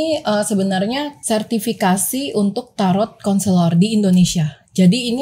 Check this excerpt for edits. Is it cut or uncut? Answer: cut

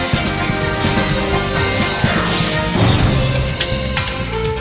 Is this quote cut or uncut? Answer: uncut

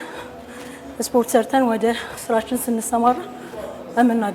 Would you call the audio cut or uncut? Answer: uncut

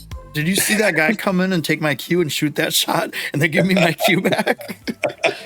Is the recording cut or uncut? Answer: uncut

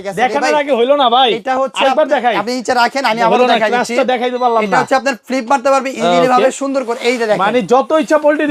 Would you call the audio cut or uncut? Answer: uncut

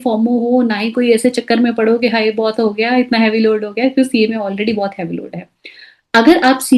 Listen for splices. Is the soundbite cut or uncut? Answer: uncut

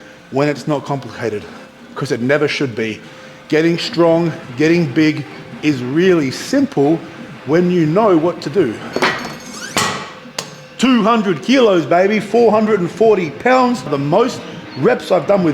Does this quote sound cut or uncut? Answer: cut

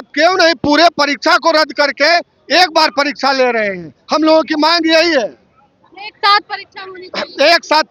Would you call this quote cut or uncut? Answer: uncut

